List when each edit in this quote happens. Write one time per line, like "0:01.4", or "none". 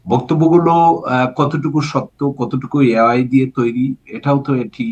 none